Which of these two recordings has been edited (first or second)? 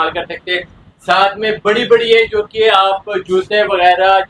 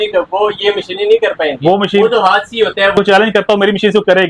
second